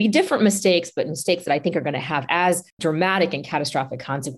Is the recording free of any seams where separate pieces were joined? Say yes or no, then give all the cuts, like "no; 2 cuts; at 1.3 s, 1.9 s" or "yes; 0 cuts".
yes; 0 cuts